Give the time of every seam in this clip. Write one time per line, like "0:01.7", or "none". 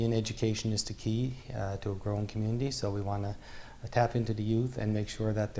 none